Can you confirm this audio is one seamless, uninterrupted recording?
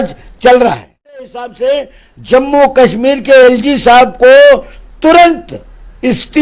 no; 1 cut; at 1.6 s

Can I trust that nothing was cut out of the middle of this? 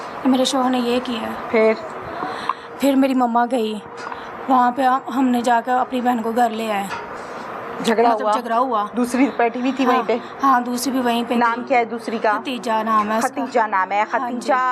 yes; 0 cuts

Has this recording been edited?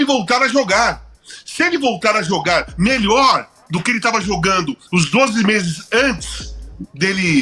no; 0 cuts

